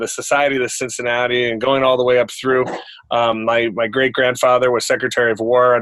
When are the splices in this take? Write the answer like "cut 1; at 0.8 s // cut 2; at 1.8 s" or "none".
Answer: none